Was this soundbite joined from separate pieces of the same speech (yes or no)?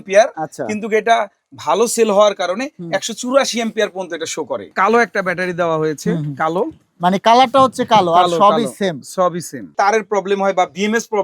yes